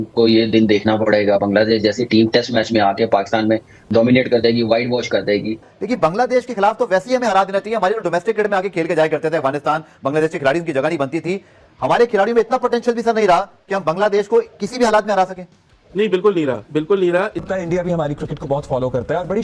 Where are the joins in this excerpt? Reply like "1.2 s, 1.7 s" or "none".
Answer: 5.6 s, 17.4 s